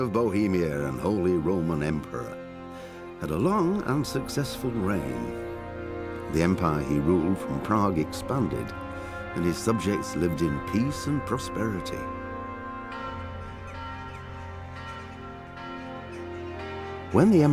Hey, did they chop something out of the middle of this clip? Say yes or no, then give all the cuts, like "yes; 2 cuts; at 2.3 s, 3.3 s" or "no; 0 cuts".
yes; 1 cut; at 7.1 s